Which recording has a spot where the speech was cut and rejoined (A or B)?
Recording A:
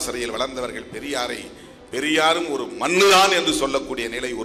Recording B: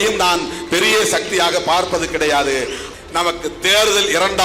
B